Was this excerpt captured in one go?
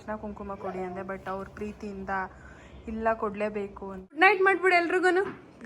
no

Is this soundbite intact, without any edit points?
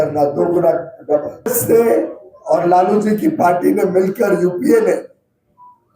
no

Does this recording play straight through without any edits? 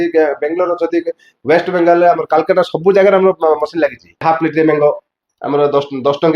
no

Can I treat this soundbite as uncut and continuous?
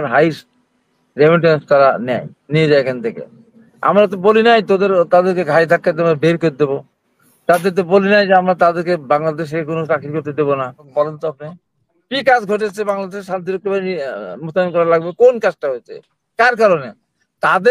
no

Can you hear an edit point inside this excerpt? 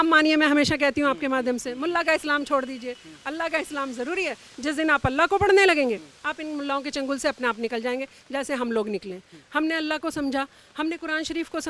no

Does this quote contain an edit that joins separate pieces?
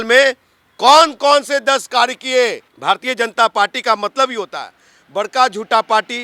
yes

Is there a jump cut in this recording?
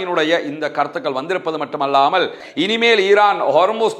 yes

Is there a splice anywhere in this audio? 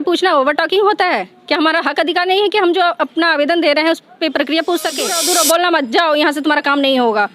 yes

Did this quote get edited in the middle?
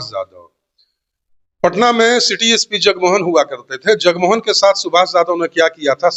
no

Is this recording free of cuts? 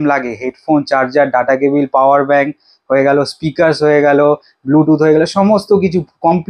yes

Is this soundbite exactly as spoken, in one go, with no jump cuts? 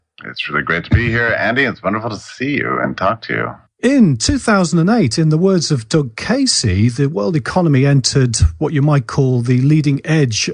yes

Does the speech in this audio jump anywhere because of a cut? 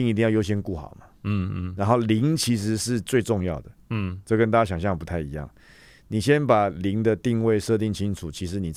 no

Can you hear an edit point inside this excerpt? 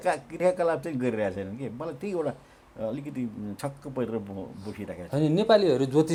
no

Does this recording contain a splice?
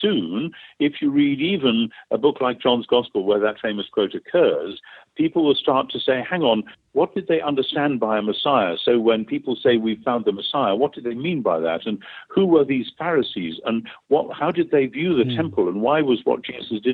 no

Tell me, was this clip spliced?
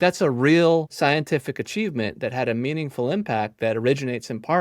yes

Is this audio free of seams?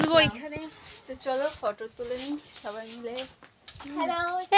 yes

